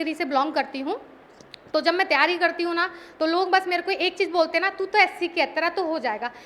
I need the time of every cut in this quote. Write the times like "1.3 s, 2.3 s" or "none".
none